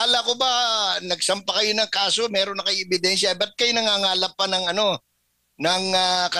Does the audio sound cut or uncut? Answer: uncut